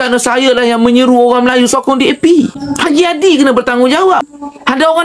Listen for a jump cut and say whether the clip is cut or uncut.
cut